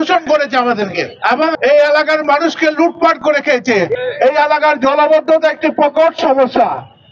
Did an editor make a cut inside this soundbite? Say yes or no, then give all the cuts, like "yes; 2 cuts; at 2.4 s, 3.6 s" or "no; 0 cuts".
yes; 2 cuts; at 1.4 s, 3.9 s